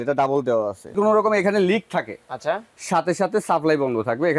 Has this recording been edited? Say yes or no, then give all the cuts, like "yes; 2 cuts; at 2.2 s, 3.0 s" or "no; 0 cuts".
yes; 1 cut; at 0.9 s